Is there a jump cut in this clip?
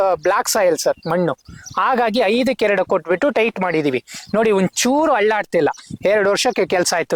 no; 0 cuts

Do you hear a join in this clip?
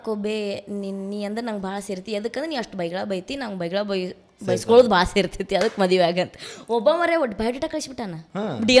no; 0 cuts

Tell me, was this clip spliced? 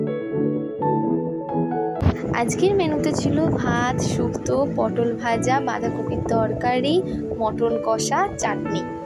no; 0 cuts

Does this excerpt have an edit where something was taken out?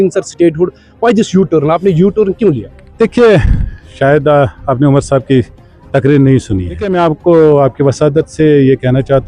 yes; 1 cut; at 6.9 s

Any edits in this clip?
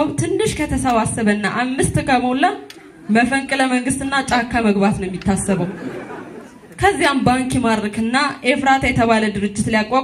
no; 0 cuts

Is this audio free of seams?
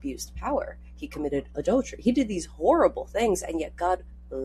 yes; 0 cuts

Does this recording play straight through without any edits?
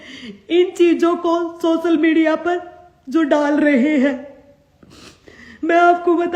yes; 0 cuts

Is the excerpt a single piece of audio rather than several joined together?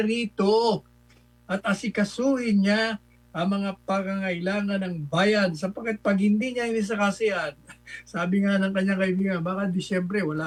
yes; 0 cuts

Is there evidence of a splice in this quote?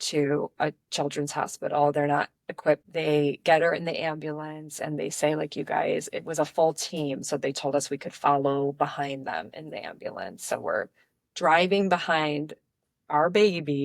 yes; 1 cut; at 2.9 s

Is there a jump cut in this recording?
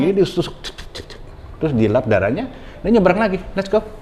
no; 0 cuts

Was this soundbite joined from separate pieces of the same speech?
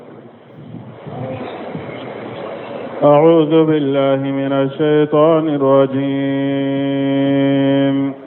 no; 0 cuts

